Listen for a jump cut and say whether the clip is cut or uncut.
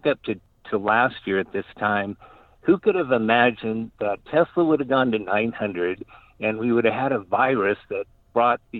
uncut